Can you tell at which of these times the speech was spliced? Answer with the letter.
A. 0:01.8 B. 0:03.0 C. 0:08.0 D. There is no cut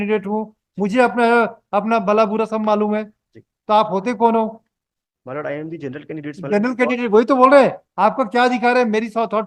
D